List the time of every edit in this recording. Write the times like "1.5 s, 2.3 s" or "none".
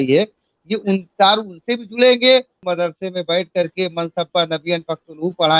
2.6 s